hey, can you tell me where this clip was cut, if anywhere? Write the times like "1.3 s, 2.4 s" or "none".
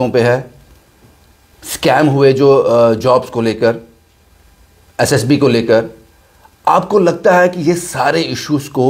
none